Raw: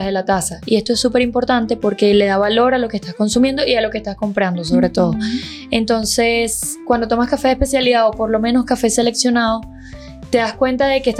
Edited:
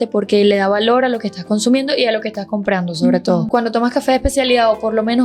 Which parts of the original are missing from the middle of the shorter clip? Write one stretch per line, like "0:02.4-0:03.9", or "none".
0:05.2-0:06.8